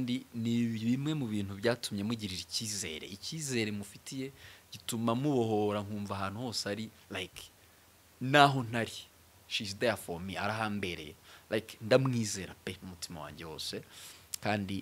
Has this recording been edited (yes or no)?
no